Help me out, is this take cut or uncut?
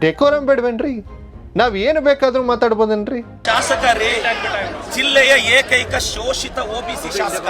cut